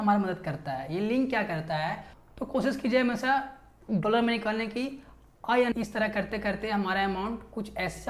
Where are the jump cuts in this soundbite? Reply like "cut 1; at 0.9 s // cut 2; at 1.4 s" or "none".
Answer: cut 1; at 2.1 s // cut 2; at 5.7 s

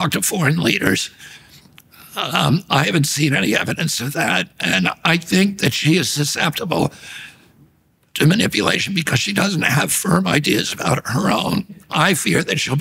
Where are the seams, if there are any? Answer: cut 1; at 11.8 s

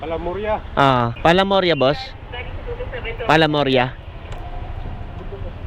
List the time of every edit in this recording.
cut 1; at 1.1 s

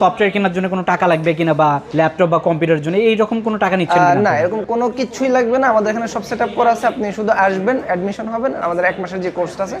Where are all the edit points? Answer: none

